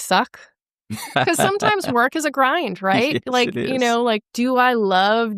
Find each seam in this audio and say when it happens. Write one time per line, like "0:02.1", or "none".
0:01.1